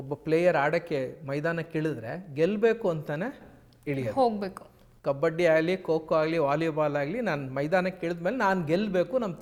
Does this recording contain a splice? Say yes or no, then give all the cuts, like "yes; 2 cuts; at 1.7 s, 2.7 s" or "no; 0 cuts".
no; 0 cuts